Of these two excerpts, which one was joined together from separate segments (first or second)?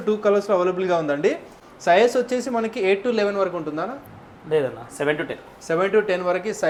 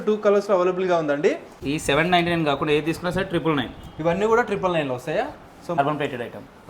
second